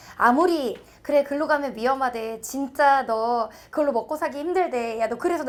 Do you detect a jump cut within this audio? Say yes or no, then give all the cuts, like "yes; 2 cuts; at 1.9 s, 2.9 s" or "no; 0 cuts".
no; 0 cuts